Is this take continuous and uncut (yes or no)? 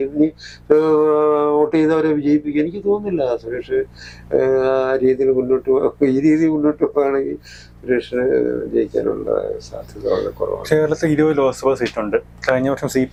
yes